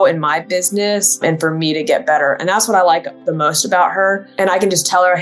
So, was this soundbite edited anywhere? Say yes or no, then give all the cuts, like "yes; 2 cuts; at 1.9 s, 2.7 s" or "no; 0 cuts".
yes; 2 cuts; at 1.2 s, 4.3 s